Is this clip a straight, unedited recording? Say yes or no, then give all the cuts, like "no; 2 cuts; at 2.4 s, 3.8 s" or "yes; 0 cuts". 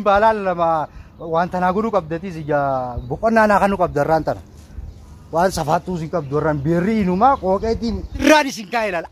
no; 1 cut; at 8.1 s